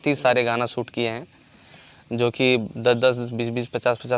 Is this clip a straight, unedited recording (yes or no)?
yes